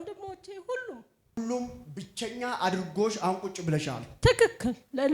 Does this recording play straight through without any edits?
no; 1 cut; at 1.4 s

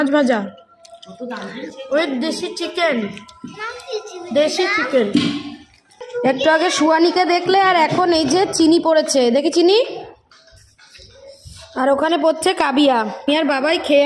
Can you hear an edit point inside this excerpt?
no; 0 cuts

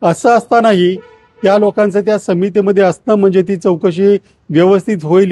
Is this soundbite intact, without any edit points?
yes; 0 cuts

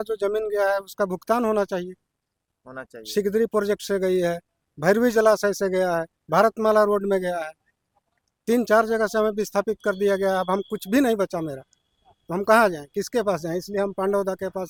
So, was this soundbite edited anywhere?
no; 0 cuts

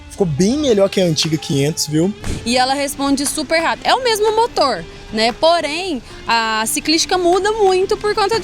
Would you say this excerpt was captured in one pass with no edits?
no; 1 cut; at 2.2 s

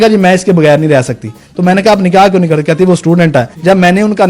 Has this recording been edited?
no; 0 cuts

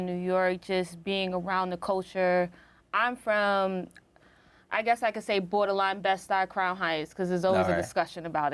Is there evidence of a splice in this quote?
no; 0 cuts

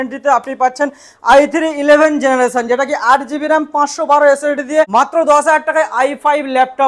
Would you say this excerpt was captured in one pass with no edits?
no; 1 cut; at 4.9 s

